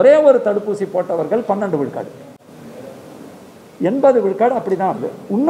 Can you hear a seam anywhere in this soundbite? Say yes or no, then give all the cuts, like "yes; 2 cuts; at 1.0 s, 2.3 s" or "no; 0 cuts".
no; 0 cuts